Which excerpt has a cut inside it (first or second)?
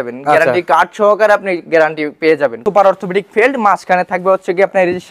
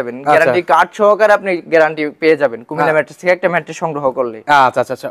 first